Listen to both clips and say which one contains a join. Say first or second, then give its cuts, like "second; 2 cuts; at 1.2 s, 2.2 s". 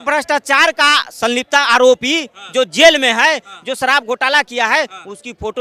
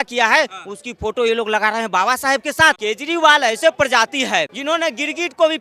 second; 2 cuts; at 2.8 s, 4.6 s